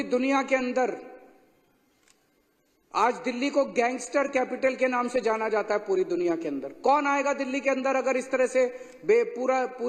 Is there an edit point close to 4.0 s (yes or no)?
no